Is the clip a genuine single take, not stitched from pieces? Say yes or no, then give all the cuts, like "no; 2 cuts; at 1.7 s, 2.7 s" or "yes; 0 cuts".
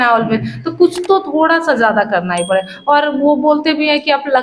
yes; 0 cuts